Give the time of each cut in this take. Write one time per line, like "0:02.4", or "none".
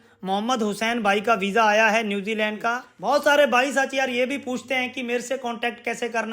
0:02.9